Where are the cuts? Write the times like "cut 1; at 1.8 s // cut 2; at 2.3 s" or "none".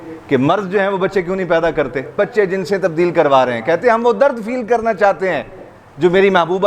cut 1; at 2.1 s